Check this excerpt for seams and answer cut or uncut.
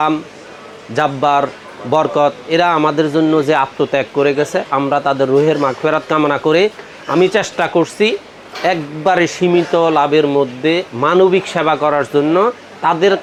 uncut